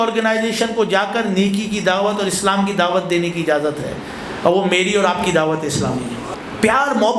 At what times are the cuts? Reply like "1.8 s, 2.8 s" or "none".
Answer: 6.2 s